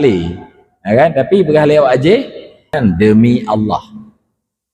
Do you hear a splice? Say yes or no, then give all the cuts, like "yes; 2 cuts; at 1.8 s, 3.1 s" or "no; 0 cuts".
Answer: yes; 1 cut; at 2.8 s